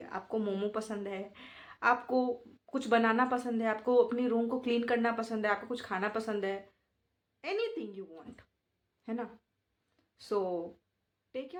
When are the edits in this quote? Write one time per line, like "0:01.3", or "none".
none